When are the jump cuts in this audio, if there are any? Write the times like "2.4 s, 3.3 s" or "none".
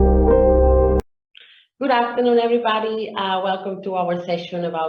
1.0 s